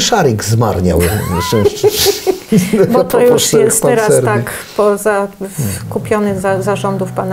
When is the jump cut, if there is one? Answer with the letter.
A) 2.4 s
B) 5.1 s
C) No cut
C